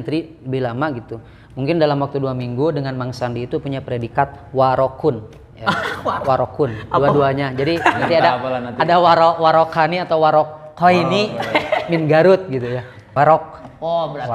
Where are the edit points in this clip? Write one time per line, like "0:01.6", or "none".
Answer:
0:13.1